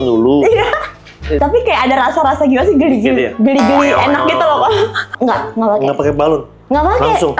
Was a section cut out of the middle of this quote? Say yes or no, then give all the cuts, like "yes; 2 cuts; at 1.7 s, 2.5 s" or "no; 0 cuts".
yes; 2 cuts; at 1.4 s, 5.0 s